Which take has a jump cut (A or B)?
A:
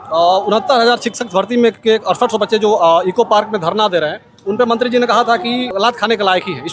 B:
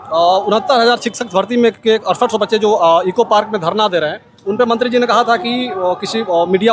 A